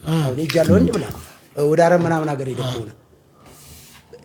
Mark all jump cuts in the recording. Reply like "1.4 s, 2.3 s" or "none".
none